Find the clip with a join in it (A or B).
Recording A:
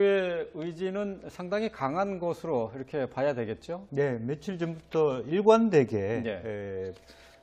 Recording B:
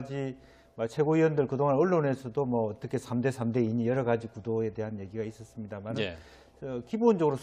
A